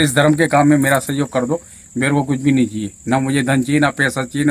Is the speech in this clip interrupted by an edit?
no; 0 cuts

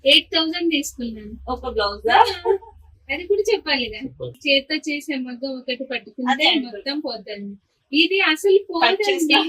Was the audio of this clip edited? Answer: yes; 1 cut; at 4.3 s

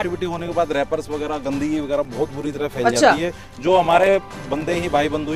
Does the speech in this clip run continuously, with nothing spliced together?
yes; 0 cuts

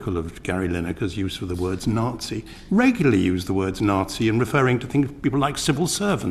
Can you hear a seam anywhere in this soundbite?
no; 0 cuts

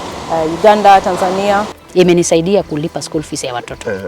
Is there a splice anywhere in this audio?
yes; 1 cut; at 1.8 s

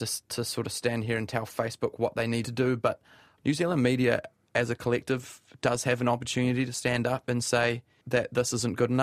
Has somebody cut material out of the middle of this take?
yes; 3 cuts; at 3.0 s, 6.8 s, 8.0 s

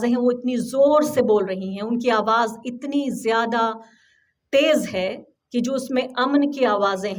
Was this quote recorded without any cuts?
yes; 0 cuts

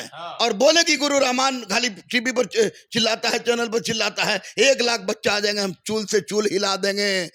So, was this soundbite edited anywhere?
no; 0 cuts

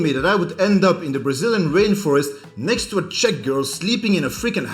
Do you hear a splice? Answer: no; 0 cuts

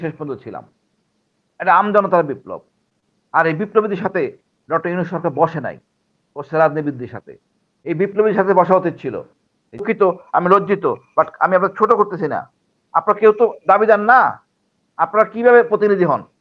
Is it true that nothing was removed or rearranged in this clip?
no; 1 cut; at 9.8 s

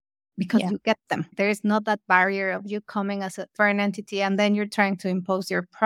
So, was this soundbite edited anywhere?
yes; 2 cuts; at 1.3 s, 3.5 s

